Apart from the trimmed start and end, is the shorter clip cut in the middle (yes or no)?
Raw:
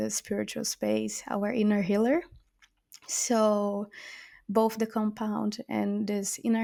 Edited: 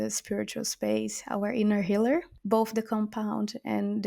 yes